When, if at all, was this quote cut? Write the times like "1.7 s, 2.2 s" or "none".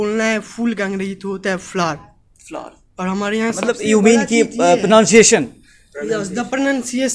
none